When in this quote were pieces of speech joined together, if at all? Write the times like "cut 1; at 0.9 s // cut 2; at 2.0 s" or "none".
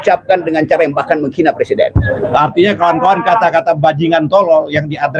cut 1; at 2.1 s